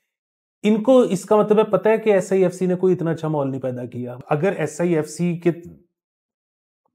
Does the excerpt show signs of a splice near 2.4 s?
no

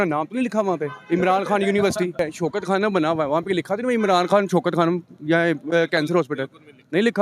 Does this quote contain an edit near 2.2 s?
yes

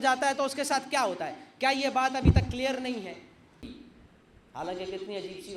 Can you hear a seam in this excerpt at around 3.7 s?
yes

